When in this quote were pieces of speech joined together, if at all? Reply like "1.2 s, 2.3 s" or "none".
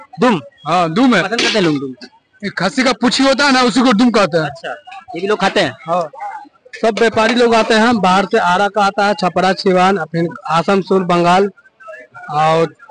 6.1 s